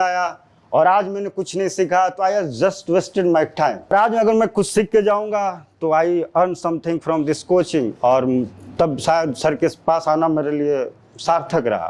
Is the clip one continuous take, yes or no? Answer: no